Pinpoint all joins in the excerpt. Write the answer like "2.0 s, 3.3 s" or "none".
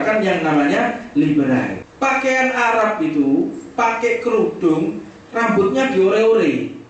1.8 s